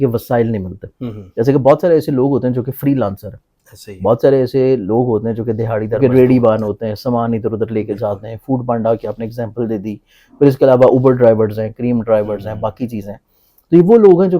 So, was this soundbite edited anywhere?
yes; 1 cut; at 6.0 s

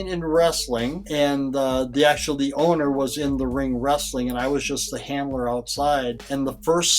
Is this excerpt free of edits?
yes; 0 cuts

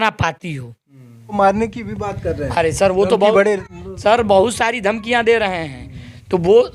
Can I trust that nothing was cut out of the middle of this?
no; 1 cut; at 1.3 s

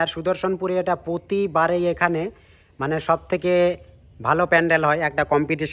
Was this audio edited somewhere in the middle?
no; 0 cuts

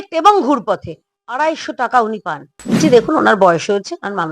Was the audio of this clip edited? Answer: yes; 1 cut; at 2.8 s

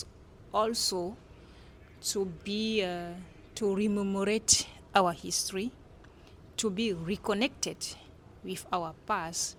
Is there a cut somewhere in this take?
no; 0 cuts

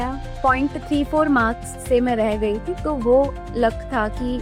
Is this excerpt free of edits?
yes; 0 cuts

